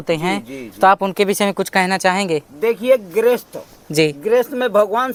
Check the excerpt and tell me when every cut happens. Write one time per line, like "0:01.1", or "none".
none